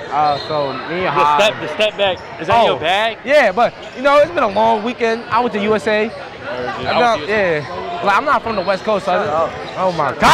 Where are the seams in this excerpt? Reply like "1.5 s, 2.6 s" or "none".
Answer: none